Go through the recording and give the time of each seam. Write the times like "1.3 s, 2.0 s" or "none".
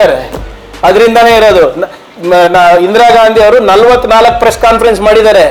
none